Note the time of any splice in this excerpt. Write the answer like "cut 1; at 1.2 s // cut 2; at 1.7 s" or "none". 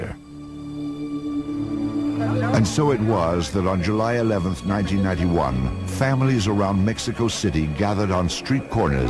cut 1; at 5.7 s

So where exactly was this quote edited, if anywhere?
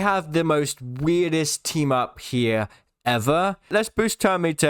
cut 1; at 3.7 s

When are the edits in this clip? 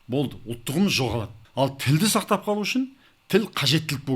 cut 1; at 1.4 s

